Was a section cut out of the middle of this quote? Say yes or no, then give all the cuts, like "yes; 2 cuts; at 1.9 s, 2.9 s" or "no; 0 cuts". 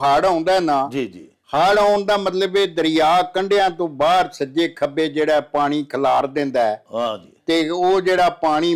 no; 0 cuts